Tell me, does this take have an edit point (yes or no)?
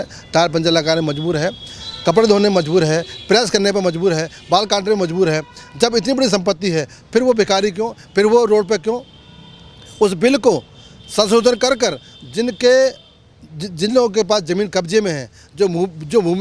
no